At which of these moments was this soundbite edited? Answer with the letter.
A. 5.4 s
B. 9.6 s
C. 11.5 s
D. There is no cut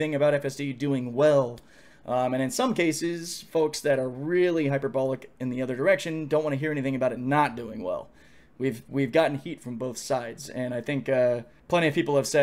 C